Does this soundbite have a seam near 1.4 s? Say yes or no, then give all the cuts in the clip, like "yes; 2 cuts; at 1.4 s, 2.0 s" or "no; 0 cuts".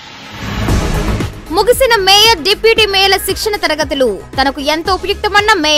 yes; 1 cut; at 1.4 s